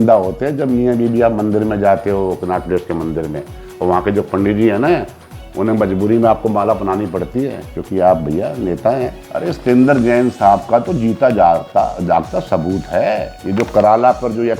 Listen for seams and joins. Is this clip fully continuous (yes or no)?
no